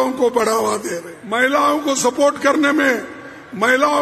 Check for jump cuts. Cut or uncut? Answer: cut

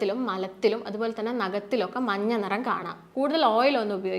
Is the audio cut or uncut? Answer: cut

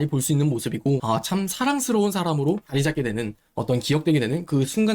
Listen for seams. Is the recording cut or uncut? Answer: cut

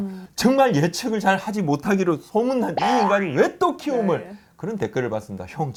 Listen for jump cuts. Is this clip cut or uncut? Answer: uncut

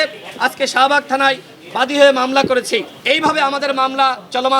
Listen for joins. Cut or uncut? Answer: cut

